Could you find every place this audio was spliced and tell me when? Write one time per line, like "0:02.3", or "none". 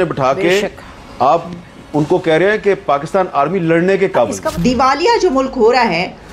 0:04.5